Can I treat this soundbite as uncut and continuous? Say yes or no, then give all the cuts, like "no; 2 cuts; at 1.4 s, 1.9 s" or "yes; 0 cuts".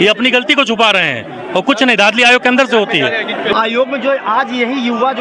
no; 1 cut; at 3.5 s